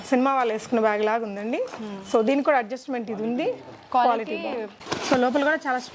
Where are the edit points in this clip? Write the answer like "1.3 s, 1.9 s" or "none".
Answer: 4.9 s